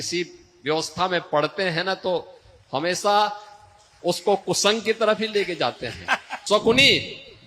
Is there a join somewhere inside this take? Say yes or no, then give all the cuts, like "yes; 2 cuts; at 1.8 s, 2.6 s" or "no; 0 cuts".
yes; 1 cut; at 6.3 s